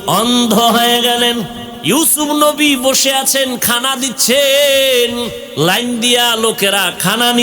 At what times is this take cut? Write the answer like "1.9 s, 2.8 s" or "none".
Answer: 1.7 s, 5.4 s

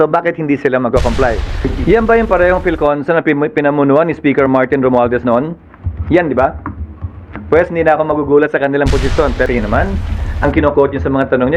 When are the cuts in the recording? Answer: 1.7 s, 9.5 s

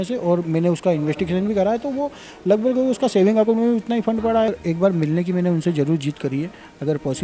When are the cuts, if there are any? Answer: 4.5 s

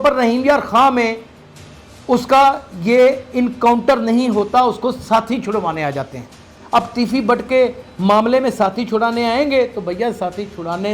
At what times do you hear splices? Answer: 6.6 s

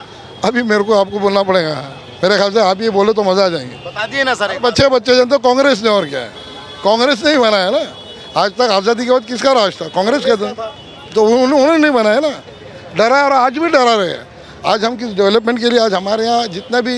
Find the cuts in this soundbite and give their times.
none

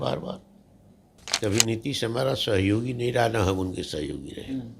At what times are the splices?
1.3 s

